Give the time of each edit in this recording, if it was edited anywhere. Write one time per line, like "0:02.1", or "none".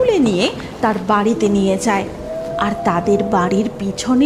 none